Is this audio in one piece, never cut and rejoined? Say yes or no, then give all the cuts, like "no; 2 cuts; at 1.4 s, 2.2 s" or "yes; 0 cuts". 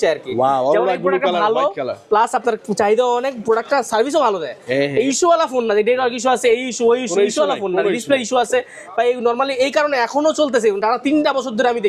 yes; 0 cuts